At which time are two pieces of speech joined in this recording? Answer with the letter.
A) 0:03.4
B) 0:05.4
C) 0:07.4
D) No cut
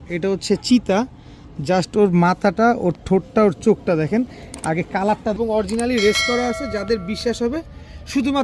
B